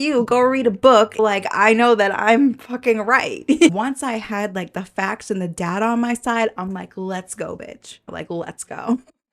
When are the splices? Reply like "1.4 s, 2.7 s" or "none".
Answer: 1.2 s, 3.7 s, 8.1 s